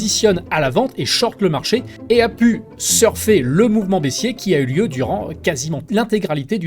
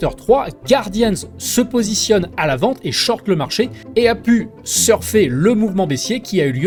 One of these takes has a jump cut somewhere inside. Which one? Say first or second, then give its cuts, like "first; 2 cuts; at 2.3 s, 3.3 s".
first; 1 cut; at 5.8 s